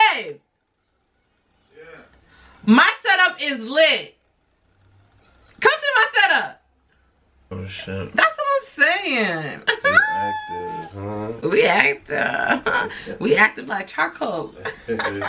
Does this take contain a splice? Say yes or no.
yes